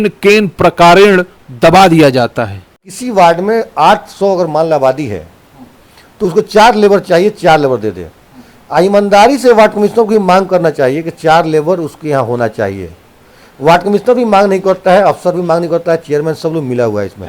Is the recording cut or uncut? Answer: cut